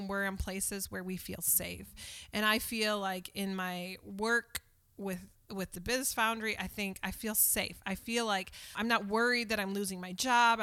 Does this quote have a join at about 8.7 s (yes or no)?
yes